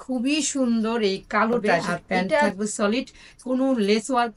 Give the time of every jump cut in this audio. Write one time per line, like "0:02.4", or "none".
0:02.5